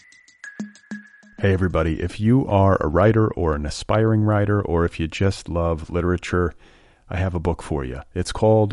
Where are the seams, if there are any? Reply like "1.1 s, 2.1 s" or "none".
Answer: 1.0 s